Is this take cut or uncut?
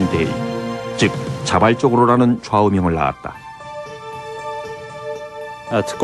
cut